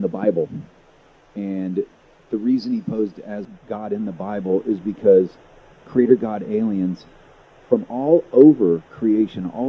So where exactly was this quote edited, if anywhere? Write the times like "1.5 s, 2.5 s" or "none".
5.1 s